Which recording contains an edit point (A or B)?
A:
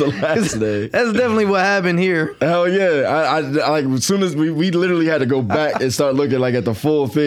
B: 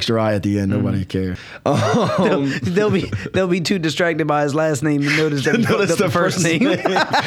B